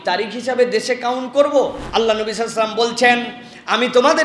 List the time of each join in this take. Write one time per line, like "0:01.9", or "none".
0:01.8

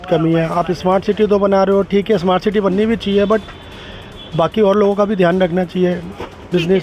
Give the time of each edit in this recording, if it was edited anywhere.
none

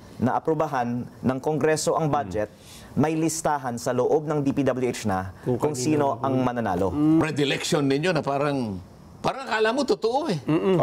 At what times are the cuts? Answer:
0:07.2

